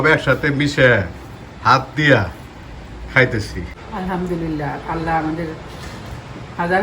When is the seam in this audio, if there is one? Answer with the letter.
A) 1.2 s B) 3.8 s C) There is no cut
B